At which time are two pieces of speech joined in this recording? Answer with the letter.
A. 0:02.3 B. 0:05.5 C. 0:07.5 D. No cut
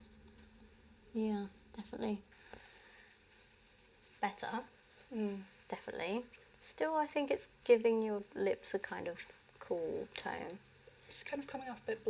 A